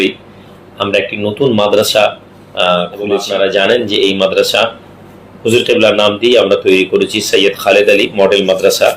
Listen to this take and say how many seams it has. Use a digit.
1